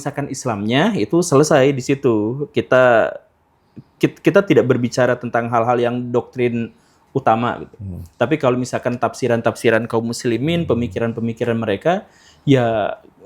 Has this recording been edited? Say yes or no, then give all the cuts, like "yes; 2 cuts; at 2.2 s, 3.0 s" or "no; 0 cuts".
no; 0 cuts